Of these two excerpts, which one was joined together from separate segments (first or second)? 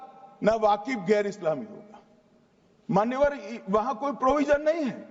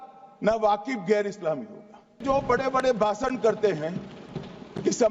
second